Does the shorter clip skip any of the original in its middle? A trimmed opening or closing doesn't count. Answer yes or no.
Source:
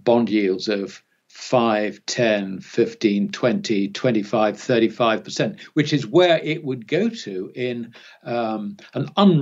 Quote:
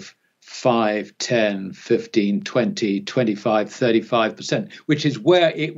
no